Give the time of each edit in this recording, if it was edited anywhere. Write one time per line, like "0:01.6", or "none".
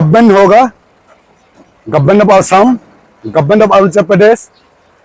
none